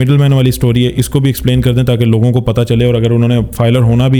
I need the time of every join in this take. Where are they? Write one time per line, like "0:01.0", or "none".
none